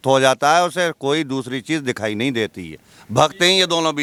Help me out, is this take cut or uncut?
uncut